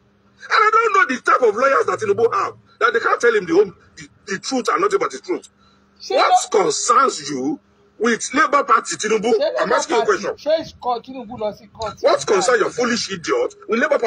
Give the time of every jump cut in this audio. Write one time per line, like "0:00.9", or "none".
none